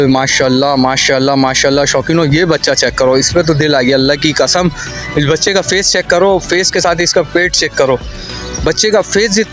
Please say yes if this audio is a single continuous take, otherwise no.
yes